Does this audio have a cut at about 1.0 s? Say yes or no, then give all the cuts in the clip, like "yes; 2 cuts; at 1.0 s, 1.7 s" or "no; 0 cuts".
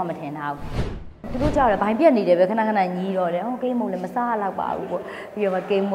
yes; 1 cut; at 1.0 s